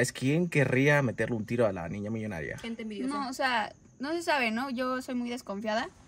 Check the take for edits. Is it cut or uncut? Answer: uncut